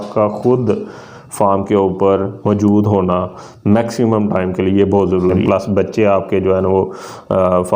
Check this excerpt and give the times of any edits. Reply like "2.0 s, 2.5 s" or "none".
5.4 s